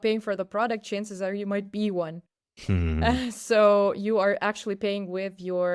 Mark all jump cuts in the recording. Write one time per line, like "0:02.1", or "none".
none